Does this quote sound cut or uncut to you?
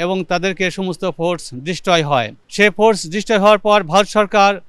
cut